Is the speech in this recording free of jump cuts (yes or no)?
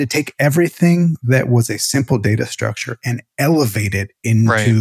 yes